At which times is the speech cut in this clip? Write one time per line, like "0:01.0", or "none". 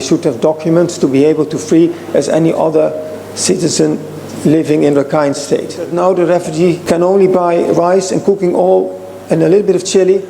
0:05.9
0:06.8